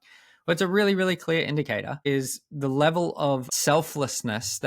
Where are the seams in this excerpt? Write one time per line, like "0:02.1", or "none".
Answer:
0:01.9
0:03.5